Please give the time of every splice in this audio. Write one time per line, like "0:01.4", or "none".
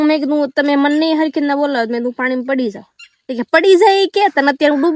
none